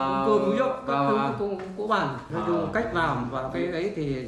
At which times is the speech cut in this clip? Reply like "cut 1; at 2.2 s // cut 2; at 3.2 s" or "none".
cut 1; at 2.3 s